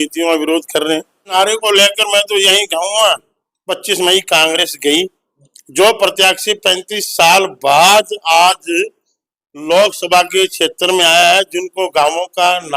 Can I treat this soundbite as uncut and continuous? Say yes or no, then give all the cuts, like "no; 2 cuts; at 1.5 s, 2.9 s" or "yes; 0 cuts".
no; 1 cut; at 1.3 s